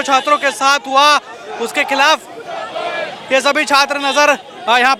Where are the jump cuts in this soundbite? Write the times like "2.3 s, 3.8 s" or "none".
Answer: none